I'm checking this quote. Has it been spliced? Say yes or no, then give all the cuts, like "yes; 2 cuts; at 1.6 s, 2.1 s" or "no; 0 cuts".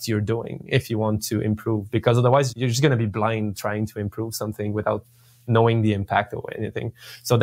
yes; 1 cut; at 2.5 s